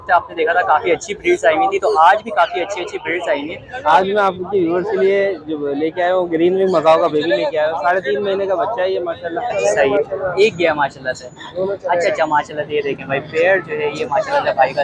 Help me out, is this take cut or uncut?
cut